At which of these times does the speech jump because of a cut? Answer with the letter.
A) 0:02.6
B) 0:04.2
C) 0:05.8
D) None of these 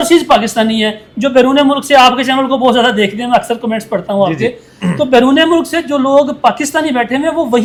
D